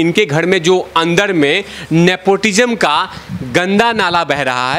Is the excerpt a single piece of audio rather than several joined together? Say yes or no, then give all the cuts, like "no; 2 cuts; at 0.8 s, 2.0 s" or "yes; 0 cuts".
yes; 0 cuts